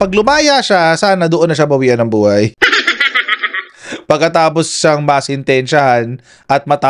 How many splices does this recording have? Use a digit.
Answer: 0